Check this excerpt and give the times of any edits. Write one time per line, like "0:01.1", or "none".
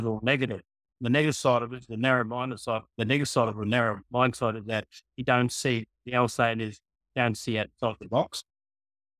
none